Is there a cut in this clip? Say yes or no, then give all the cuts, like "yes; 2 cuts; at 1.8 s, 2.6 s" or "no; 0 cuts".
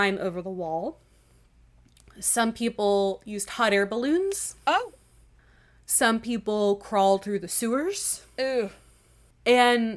no; 0 cuts